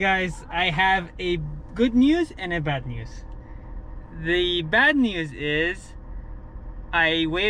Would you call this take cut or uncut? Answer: uncut